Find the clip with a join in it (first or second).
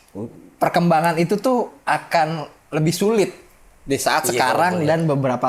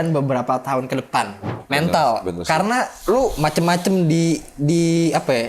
second